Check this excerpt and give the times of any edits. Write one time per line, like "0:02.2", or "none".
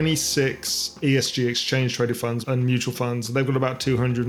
0:01.0
0:02.4

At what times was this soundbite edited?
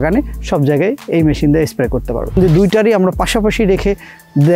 0:02.4

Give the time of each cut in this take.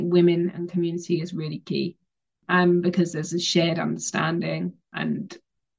0:04.9

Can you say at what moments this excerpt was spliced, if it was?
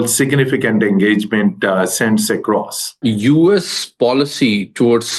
0:03.0

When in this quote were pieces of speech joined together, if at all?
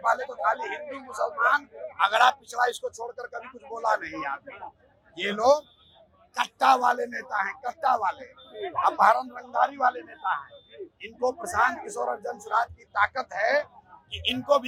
none

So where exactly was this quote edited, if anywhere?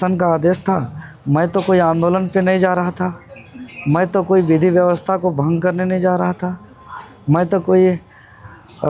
none

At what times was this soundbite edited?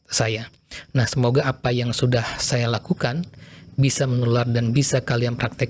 none

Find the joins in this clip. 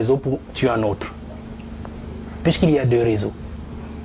none

